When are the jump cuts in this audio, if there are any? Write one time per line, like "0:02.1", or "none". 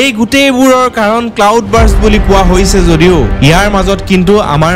none